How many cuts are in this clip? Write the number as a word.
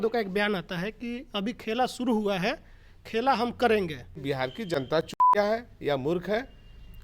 one